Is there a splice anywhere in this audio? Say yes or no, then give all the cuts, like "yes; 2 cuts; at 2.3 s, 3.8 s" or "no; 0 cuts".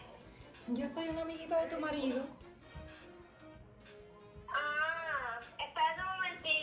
no; 0 cuts